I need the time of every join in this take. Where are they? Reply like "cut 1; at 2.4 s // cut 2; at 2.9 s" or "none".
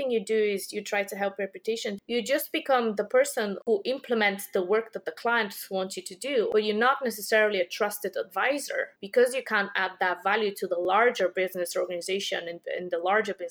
cut 1; at 2.0 s // cut 2; at 3.6 s // cut 3; at 6.5 s